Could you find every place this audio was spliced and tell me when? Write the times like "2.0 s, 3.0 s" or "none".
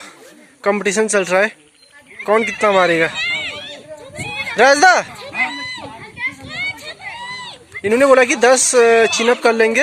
none

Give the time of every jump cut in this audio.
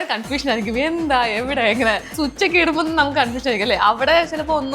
2.1 s

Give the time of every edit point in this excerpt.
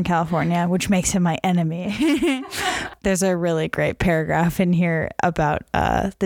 2.9 s

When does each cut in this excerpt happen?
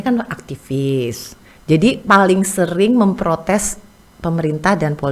none

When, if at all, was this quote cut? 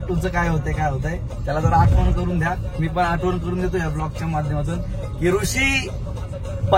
none

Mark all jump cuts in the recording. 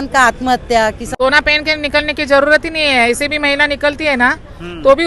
1.0 s

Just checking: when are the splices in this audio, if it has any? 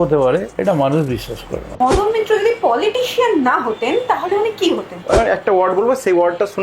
1.8 s, 5.0 s

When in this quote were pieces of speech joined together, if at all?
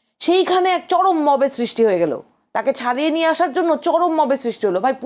none

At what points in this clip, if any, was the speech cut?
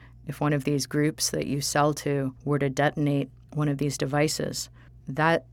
2.4 s, 3.4 s, 4.6 s

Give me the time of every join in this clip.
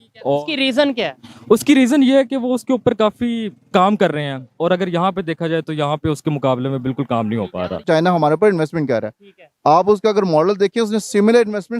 7.8 s

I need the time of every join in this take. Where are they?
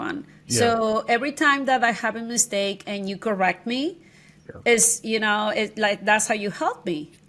none

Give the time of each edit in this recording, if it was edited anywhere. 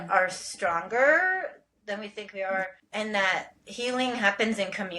2.8 s

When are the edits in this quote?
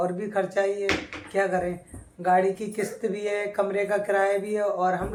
none

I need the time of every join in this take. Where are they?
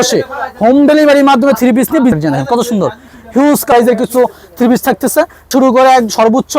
2.1 s, 3.7 s, 5.5 s

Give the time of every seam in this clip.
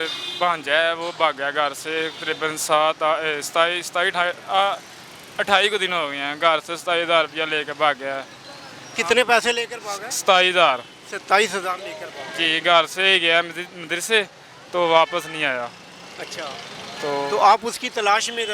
none

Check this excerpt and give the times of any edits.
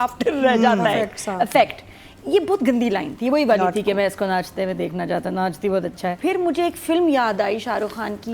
6.2 s

